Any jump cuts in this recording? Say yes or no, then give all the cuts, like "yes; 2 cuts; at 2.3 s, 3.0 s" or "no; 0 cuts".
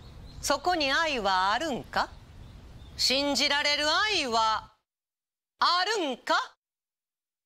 no; 0 cuts